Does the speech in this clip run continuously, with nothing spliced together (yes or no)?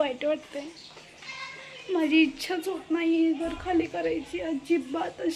yes